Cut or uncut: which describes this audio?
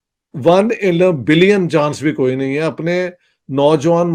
uncut